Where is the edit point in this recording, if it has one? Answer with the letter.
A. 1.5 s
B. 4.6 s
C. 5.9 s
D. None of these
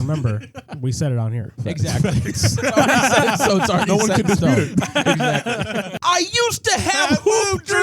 C